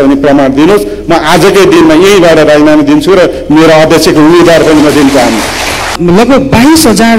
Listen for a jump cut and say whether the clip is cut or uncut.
cut